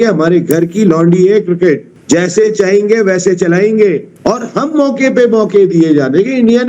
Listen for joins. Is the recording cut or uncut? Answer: uncut